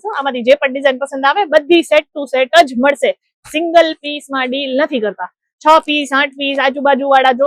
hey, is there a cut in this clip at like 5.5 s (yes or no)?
no